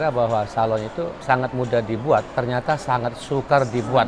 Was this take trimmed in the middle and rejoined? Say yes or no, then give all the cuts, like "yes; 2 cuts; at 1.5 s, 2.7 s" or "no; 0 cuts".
yes; 1 cut; at 1.2 s